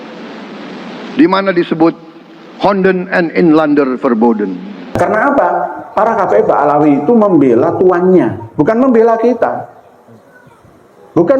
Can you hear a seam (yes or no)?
yes